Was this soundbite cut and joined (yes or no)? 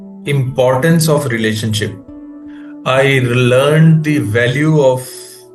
no